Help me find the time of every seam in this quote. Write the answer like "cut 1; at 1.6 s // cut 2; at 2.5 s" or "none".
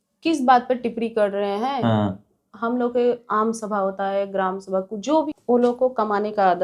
cut 1; at 5.2 s